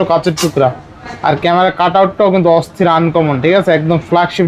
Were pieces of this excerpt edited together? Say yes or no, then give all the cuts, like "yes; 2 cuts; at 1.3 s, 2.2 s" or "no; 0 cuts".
no; 0 cuts